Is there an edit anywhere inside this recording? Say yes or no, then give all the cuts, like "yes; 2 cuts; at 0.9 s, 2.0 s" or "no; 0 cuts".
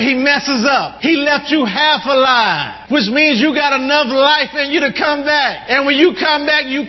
yes; 3 cuts; at 0.9 s, 2.7 s, 5.6 s